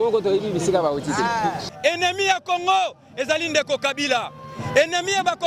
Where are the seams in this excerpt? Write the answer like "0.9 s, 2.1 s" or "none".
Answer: 1.7 s